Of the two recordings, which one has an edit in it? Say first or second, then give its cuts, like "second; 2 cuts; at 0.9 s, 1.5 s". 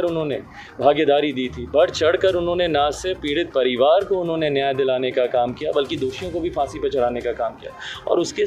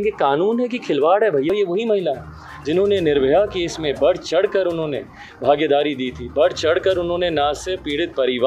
second; 1 cut; at 1.5 s